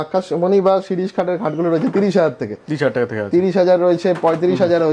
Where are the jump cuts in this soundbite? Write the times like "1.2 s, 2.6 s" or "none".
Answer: none